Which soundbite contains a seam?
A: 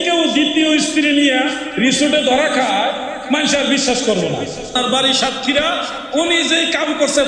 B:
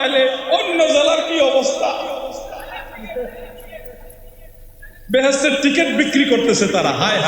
A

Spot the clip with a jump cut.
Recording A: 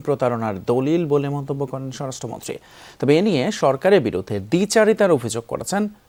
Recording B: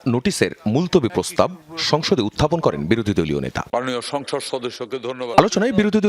B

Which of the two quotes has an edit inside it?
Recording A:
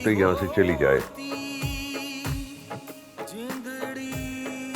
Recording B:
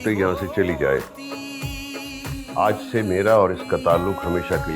B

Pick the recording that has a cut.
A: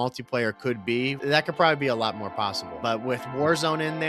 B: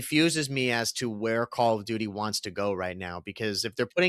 A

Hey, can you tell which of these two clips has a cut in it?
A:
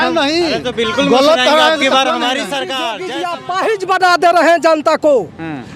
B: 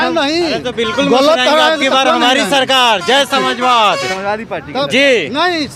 A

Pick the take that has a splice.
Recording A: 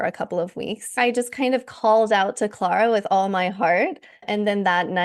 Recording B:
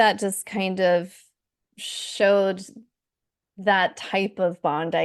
A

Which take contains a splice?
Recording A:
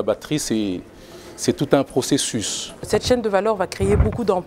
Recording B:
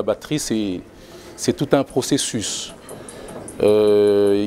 A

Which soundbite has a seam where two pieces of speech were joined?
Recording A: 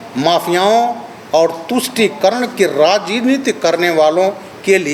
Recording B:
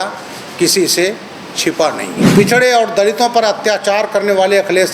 B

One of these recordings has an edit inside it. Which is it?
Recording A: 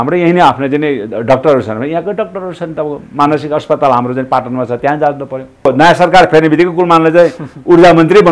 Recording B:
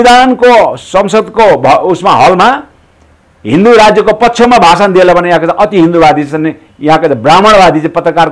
A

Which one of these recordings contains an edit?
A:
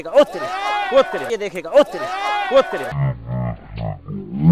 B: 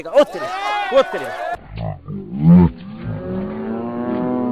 B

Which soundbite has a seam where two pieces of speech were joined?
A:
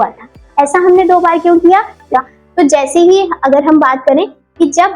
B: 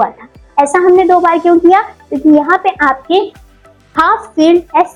A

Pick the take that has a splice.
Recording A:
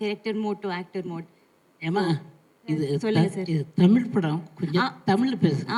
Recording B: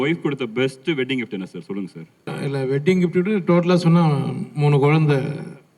B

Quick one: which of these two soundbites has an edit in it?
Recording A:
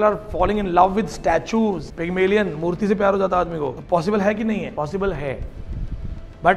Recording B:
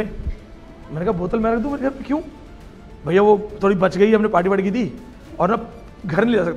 A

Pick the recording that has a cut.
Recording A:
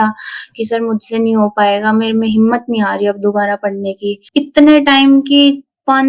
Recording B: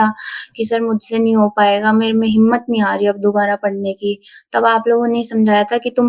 A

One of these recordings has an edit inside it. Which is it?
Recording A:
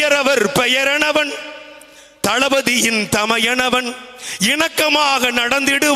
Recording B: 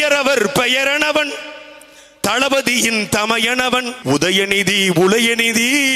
B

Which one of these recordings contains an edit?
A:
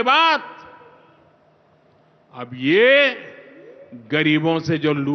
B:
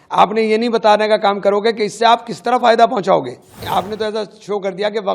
B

